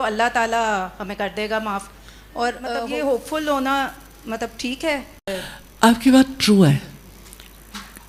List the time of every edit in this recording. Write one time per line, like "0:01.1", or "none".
none

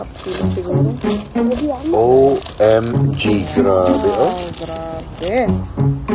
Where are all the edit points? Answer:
none

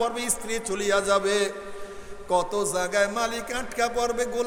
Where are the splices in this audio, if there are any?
none

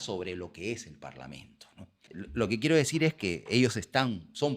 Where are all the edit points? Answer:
0:02.0

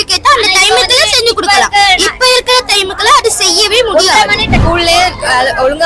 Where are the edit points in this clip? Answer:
0:04.6

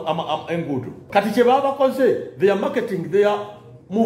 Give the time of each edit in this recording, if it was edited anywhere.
0:01.0

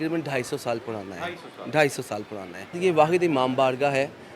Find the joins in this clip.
0:02.8

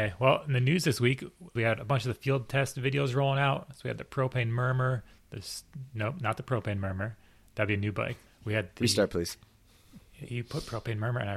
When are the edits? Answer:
0:01.5
0:08.2

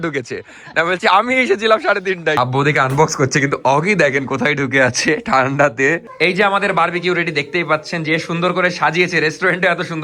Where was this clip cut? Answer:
0:02.4
0:06.1

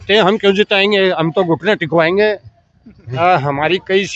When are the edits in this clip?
0:03.2

